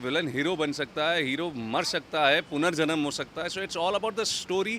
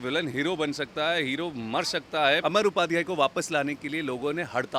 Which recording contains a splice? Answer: second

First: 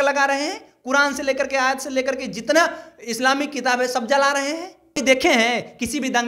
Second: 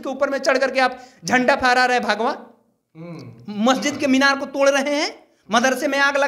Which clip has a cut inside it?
first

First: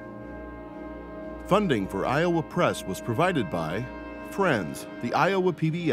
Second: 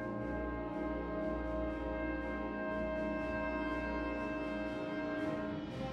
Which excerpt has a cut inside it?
first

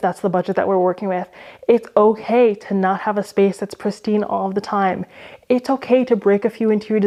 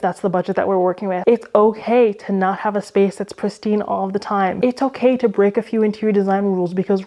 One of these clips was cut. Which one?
second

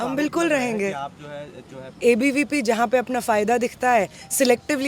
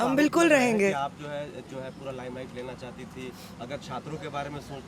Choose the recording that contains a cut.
first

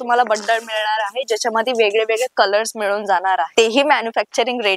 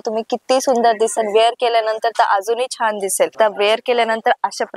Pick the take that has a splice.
second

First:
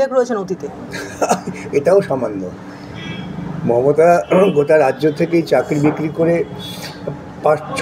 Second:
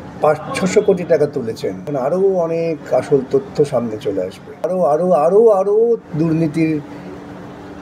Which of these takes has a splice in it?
second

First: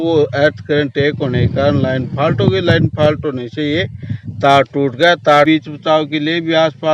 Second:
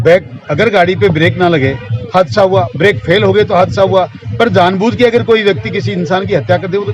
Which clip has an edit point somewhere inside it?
first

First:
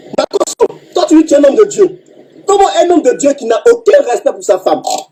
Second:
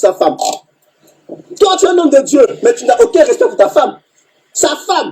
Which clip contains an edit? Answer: second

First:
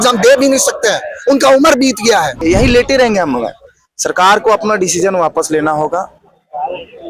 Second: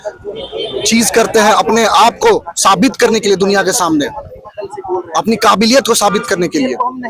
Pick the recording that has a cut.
first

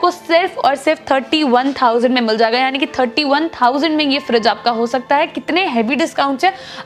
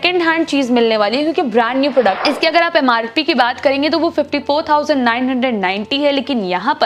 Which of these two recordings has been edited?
second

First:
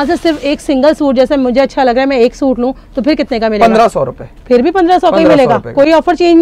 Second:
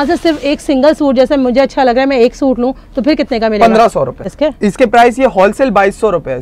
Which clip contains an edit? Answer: second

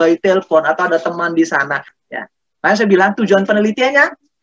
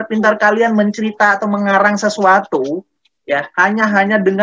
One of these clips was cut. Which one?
first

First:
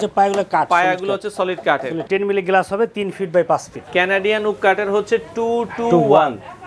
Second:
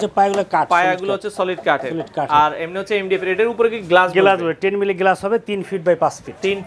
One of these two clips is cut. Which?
first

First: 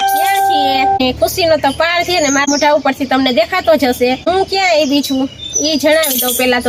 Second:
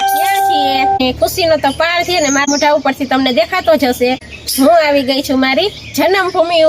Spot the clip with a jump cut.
second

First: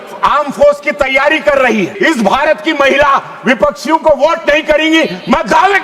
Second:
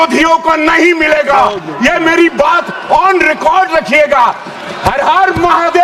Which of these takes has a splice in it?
first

